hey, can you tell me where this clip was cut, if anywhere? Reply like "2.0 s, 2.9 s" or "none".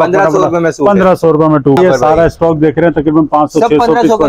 1.8 s